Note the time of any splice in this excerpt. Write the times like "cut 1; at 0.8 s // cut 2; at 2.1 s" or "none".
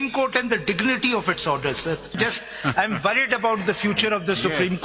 cut 1; at 2.1 s